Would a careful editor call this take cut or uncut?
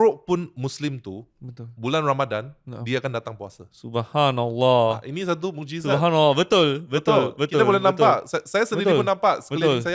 uncut